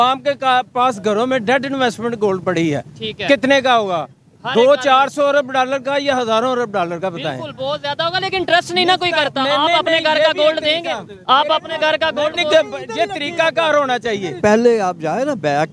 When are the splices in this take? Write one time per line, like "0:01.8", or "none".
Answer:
0:14.4